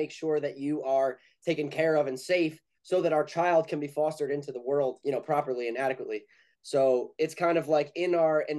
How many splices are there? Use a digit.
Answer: 1